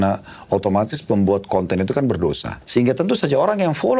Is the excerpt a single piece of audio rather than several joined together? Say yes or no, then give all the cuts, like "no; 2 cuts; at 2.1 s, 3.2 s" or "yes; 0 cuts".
no; 1 cut; at 2.5 s